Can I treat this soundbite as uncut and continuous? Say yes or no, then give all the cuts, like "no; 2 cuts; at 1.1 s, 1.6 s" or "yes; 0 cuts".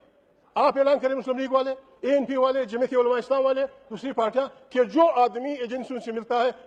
yes; 0 cuts